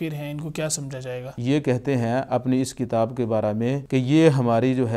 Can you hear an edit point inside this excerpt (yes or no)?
yes